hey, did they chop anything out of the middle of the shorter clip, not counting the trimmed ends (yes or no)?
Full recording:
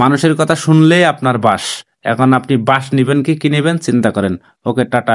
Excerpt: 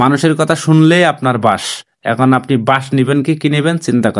no